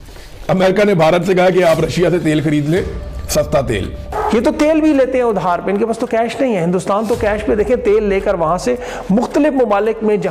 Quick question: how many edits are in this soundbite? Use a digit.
1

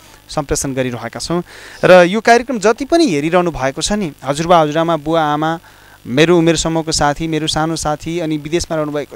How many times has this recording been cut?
0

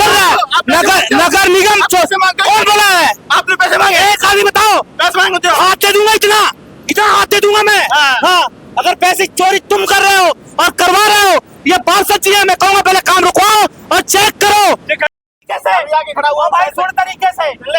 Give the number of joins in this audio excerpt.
1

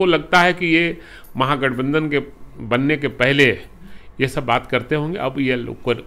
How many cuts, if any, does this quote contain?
0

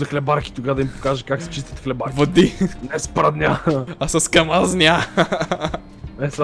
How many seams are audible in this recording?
1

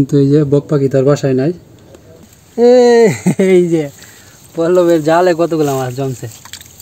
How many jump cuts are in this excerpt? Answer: 1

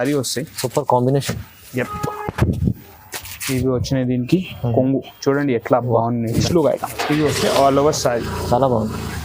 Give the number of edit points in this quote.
1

